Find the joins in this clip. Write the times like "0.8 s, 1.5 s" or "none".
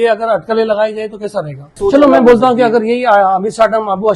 1.7 s